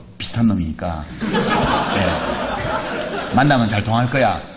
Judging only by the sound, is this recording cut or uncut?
uncut